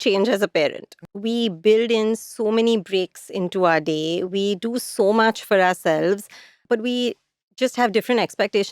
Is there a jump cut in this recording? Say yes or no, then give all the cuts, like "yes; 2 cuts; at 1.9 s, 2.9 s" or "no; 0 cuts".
yes; 2 cuts; at 0.9 s, 6.6 s